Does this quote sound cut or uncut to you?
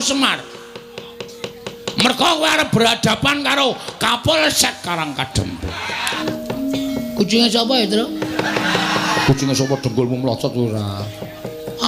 cut